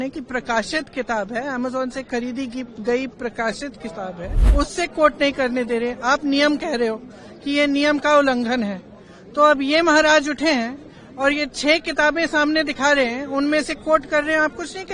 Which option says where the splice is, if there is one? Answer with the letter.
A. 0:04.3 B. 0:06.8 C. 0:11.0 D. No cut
A